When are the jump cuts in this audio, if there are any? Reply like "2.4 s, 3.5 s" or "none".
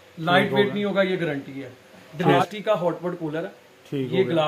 2.5 s